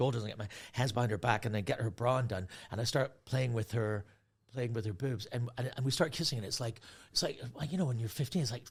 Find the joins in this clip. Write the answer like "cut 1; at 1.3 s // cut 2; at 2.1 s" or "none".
none